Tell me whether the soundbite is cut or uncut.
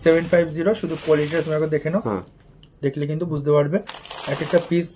uncut